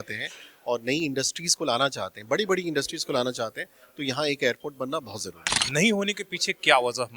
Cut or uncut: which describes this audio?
cut